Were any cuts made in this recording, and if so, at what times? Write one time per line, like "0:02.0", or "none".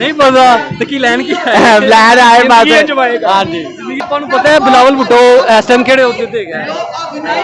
0:04.1